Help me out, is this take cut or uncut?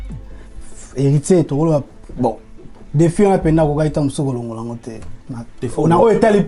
uncut